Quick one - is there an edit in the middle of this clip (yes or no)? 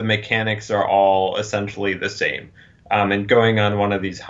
no